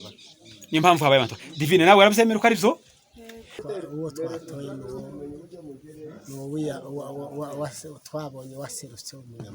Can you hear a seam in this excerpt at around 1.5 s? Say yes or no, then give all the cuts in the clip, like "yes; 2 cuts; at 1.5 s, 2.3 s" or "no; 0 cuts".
no; 1 cut; at 3.5 s